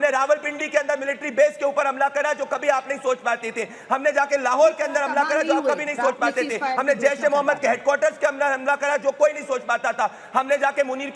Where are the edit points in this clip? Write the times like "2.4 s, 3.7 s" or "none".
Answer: none